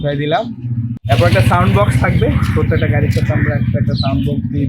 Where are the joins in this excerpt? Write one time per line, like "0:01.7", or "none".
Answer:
0:01.0